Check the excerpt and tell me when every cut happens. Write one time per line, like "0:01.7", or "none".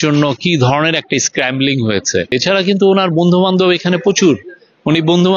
0:02.3